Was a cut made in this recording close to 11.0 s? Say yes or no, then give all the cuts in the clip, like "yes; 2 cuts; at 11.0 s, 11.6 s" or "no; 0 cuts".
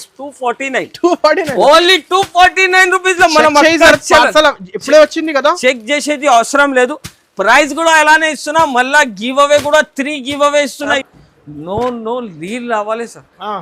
yes; 1 cut; at 11.0 s